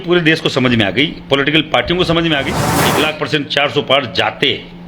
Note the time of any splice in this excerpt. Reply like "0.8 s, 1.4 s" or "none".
2.8 s